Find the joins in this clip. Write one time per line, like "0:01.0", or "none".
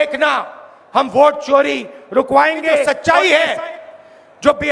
0:02.8